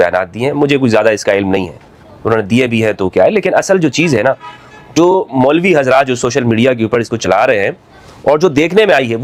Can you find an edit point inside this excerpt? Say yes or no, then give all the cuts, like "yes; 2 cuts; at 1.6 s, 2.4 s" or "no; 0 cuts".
no; 0 cuts